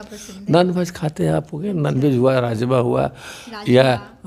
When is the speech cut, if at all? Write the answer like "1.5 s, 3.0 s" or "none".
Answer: none